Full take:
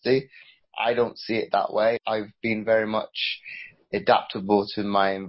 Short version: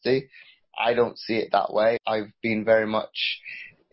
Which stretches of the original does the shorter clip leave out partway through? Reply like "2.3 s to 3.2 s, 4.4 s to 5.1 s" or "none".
none

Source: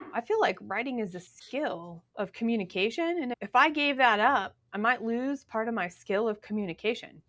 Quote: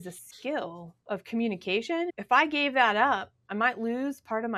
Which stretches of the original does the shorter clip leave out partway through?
3.2 s to 3.4 s

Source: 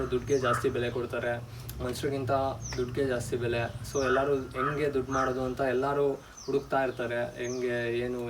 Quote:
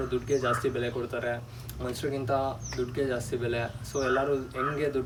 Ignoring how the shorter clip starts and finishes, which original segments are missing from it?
none

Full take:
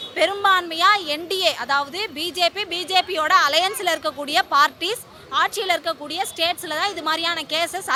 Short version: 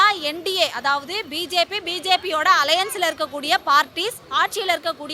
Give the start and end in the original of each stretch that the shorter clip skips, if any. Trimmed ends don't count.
5.1 s to 5.2 s

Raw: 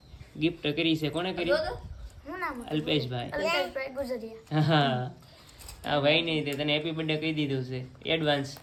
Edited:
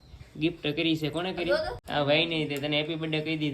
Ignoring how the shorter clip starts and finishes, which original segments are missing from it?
1.8 s to 5.8 s

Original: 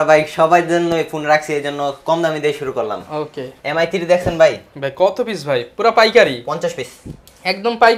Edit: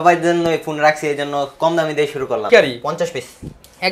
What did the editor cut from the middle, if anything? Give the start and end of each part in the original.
2.9 s to 6.1 s

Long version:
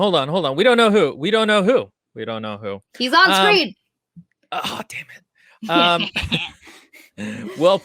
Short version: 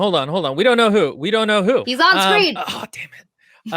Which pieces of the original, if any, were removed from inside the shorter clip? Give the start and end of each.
1.9 s to 3.0 s, 3.7 s to 4.5 s

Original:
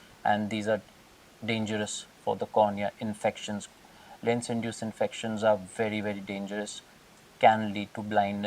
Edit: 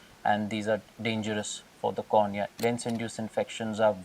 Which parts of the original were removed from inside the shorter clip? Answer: 0.9 s to 1.3 s, 3.0 s to 4.2 s

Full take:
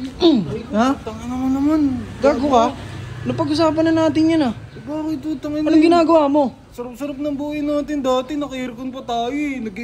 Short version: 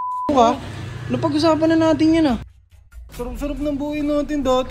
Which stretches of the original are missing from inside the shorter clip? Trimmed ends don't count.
5.1 s to 6.6 s

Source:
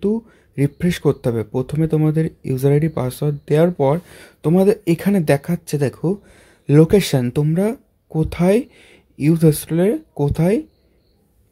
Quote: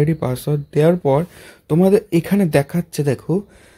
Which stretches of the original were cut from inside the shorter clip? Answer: none

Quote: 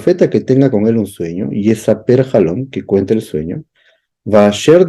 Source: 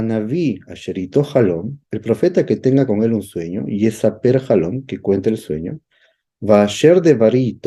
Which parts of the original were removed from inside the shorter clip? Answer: none

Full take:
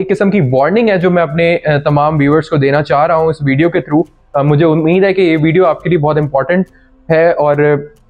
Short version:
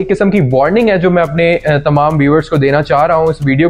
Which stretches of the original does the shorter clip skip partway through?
none

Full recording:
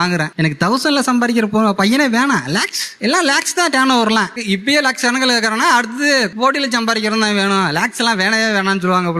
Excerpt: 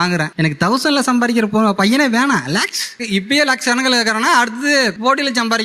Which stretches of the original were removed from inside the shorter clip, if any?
2.9 s to 4.3 s

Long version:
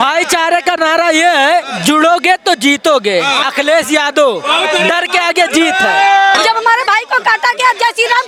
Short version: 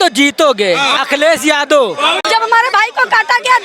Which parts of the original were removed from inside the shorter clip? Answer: 4.7 s to 6.4 s

